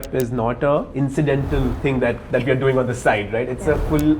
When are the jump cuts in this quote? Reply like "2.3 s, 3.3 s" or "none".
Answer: 0.9 s, 1.8 s